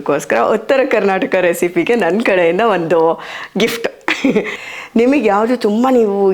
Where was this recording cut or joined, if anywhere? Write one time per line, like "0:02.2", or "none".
0:04.6